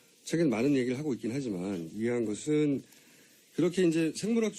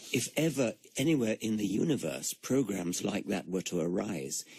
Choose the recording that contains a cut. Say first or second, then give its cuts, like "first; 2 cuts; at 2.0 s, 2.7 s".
first; 1 cut; at 2.1 s